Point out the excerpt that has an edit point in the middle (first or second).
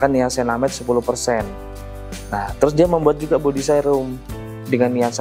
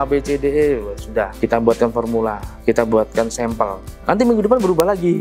second